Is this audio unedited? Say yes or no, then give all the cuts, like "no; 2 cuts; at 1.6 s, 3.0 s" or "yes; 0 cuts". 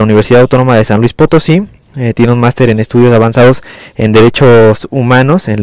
no; 1 cut; at 4.6 s